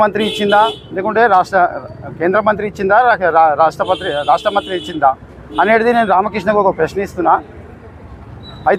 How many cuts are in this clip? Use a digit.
0